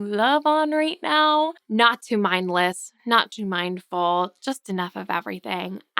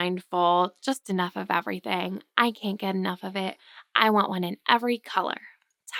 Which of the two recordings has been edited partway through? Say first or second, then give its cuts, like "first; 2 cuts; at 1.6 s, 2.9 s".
first; 1 cut; at 1.6 s